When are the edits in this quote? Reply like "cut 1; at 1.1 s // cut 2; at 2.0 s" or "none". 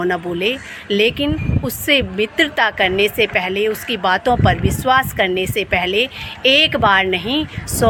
none